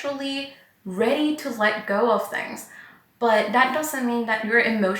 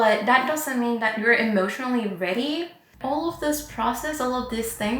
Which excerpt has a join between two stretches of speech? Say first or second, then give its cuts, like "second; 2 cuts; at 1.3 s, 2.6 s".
second; 1 cut; at 2.8 s